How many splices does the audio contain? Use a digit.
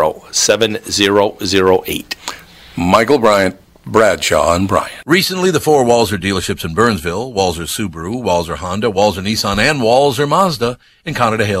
1